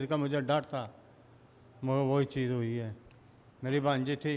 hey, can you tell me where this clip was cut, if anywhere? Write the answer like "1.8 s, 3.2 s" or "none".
none

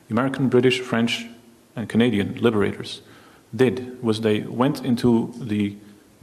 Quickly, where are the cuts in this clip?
none

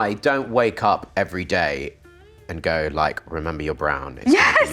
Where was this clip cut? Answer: none

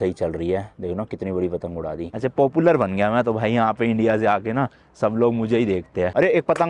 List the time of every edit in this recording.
2.1 s

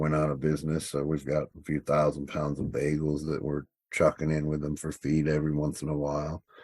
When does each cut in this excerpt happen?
1.6 s

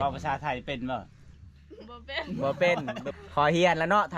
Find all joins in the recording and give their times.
3.0 s

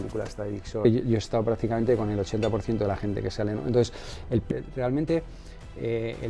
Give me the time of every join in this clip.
0.8 s, 4.5 s

